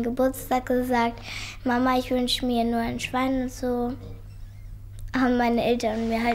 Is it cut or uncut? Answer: uncut